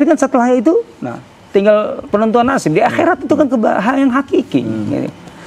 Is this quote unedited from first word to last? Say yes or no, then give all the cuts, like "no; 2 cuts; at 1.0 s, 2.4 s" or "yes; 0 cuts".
yes; 0 cuts